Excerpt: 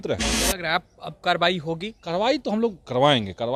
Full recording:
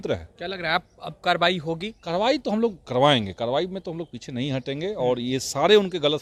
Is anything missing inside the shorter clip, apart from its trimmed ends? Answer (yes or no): no